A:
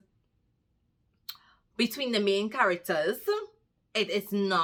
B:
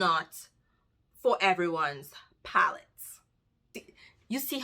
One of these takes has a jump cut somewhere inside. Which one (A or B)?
B